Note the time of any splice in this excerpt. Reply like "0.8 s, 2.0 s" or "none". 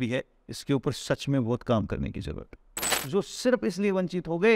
2.9 s